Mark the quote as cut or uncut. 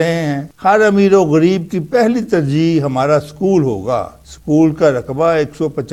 uncut